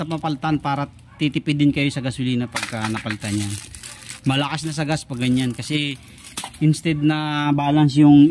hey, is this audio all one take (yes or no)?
yes